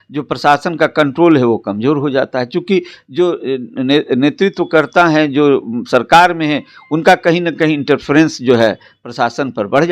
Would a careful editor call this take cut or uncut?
uncut